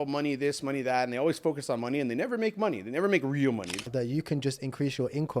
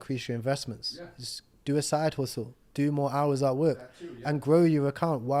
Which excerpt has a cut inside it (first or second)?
first